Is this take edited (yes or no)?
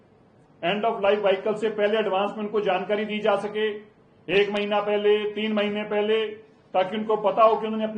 no